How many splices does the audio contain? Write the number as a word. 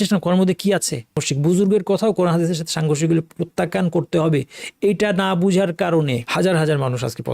two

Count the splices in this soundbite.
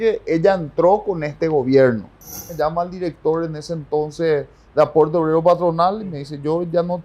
one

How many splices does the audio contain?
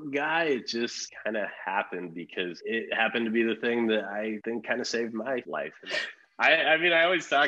four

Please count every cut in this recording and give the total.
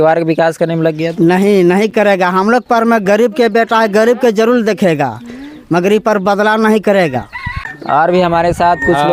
zero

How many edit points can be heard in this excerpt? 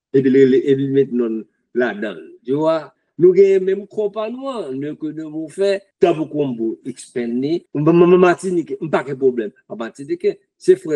two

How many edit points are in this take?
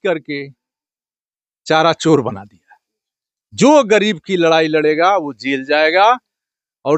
zero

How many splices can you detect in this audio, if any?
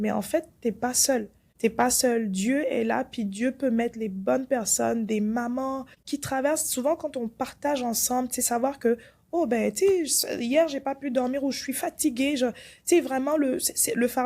two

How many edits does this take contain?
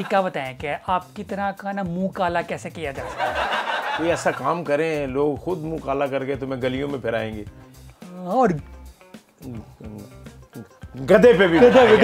zero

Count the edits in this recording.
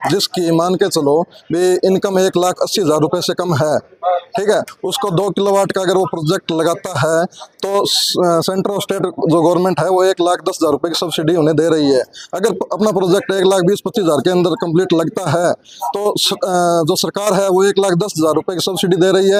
zero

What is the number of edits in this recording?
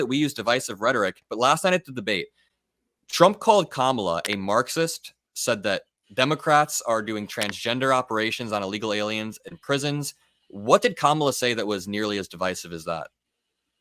one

